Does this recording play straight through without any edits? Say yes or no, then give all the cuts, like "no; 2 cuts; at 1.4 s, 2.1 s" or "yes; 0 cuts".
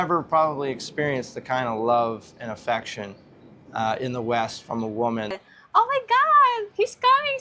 no; 1 cut; at 5.4 s